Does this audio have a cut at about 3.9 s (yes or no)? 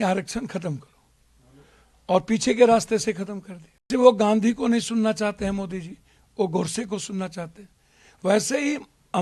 yes